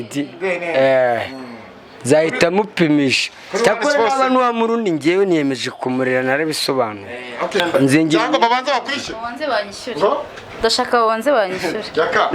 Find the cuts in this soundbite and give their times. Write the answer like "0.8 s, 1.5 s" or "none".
7.6 s